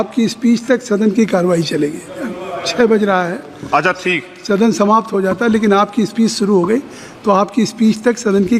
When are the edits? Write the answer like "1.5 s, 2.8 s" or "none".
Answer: none